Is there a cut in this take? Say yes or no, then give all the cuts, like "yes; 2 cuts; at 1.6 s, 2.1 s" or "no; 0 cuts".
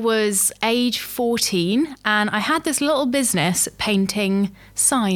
no; 0 cuts